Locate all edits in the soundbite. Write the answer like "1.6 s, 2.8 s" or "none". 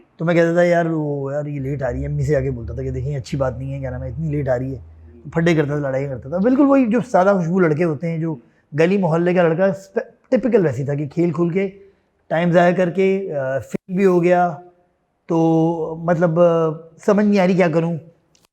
none